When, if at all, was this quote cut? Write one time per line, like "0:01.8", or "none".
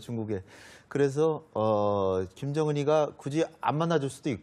none